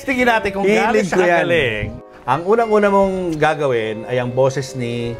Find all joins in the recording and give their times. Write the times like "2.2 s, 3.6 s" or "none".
1.9 s